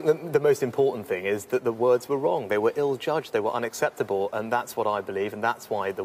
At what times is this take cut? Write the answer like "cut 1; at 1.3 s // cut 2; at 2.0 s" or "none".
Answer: none